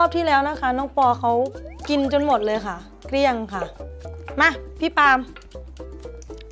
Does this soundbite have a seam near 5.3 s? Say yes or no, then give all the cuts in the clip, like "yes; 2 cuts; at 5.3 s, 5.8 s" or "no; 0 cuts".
yes; 1 cut; at 5.3 s